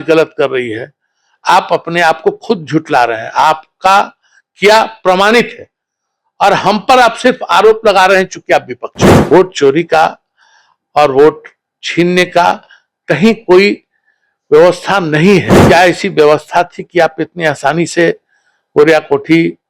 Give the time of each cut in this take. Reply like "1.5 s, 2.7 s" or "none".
9.3 s, 15.5 s